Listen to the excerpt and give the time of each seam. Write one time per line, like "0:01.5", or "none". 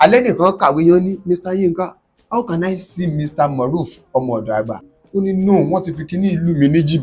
0:04.9